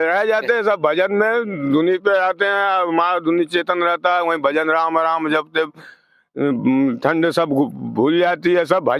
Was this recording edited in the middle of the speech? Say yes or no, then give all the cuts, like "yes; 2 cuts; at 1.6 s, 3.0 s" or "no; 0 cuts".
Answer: no; 0 cuts